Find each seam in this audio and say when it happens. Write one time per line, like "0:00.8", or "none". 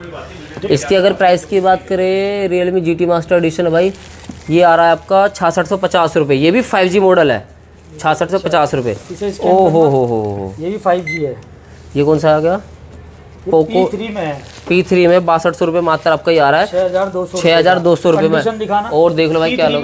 none